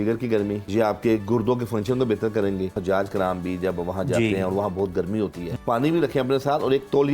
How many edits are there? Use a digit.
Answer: 3